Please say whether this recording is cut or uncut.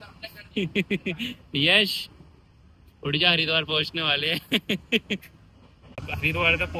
uncut